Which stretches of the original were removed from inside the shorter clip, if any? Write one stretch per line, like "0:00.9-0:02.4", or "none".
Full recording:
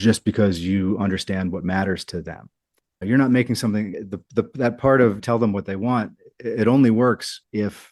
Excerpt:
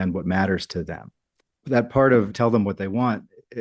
0:03.0-0:04.5